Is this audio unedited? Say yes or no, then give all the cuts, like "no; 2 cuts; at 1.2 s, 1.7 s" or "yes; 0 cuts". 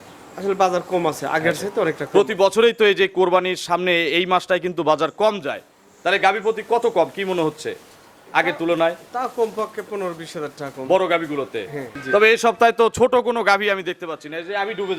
no; 1 cut; at 11.9 s